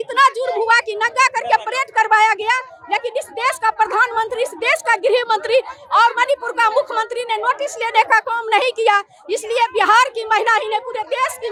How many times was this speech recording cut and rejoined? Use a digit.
0